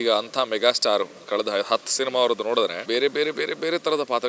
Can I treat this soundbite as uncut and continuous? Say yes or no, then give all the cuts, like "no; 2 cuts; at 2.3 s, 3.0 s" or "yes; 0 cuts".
no; 1 cut; at 2.8 s